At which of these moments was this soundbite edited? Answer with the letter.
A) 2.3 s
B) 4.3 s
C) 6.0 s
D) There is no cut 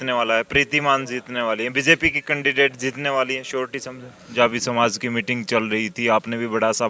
B